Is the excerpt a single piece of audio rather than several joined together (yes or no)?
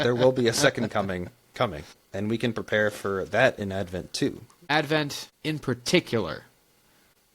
no